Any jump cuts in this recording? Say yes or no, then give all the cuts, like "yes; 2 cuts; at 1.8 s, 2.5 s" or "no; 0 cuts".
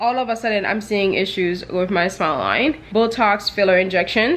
yes; 1 cut; at 2.8 s